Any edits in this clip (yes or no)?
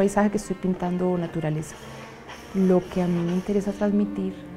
no